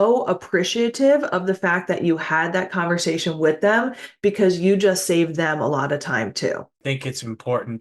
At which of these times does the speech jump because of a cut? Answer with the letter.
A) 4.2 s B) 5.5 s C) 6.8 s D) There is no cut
C